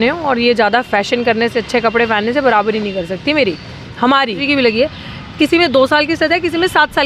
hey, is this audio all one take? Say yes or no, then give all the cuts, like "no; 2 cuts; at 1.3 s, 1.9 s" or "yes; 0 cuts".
no; 1 cut; at 4.4 s